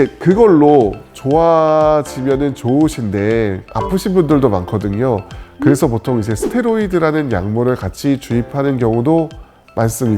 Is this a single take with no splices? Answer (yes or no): yes